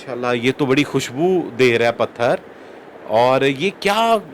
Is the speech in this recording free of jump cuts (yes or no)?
yes